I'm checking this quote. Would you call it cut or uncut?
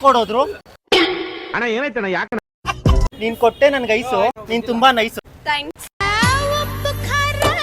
uncut